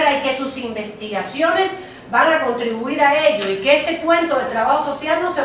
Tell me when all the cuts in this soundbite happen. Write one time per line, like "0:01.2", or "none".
0:00.9